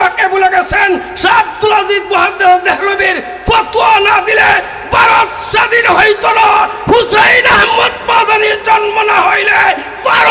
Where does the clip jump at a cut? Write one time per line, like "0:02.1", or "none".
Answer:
none